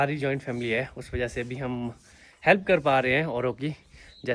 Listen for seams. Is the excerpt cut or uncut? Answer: uncut